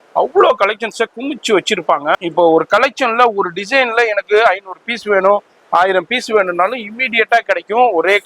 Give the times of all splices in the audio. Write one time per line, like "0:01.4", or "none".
0:02.1